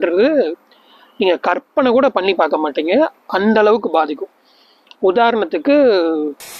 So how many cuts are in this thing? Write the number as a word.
zero